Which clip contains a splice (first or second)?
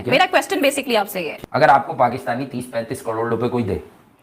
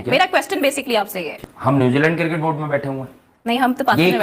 first